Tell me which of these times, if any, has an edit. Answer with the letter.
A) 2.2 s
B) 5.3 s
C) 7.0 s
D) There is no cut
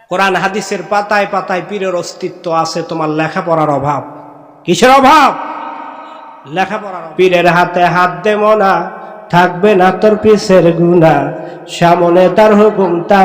C